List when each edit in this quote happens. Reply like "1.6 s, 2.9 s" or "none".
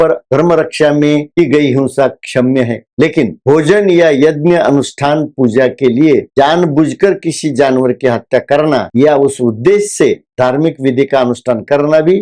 none